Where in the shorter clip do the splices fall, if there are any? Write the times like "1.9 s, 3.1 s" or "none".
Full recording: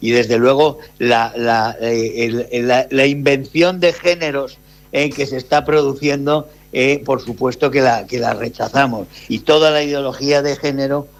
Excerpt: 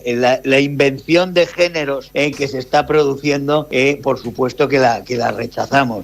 2.0 s, 3.7 s